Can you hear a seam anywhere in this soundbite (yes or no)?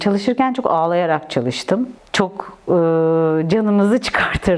yes